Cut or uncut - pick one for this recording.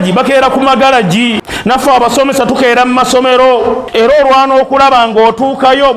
cut